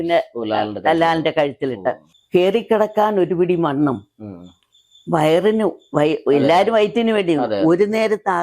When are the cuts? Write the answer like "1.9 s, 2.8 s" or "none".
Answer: 2.1 s